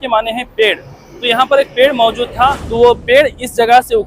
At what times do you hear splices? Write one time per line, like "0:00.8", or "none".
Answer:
0:02.6

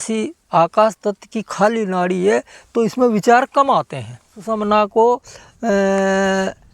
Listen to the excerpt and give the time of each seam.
0:04.4

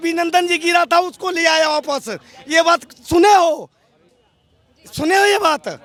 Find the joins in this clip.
none

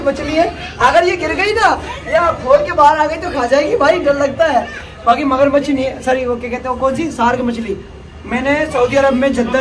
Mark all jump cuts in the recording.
none

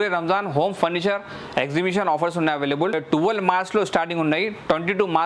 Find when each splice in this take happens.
0:03.0

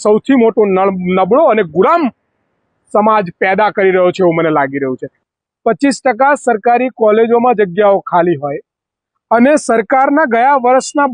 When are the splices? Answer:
0:05.1

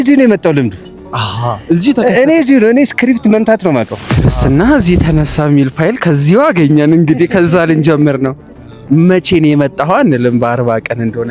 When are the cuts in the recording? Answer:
0:04.0

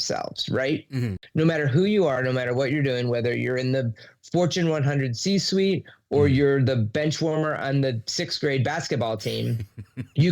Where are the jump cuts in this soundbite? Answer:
0:01.1

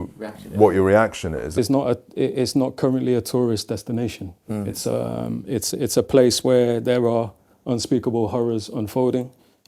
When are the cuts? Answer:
0:01.5

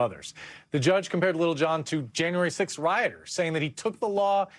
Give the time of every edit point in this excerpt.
0:03.5

